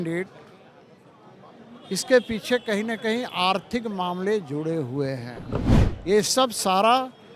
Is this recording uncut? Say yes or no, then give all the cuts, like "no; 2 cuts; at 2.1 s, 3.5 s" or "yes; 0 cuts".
no; 1 cut; at 5.8 s